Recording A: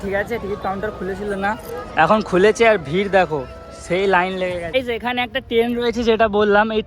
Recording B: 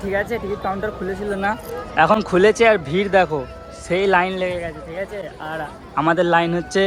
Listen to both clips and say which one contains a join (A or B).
A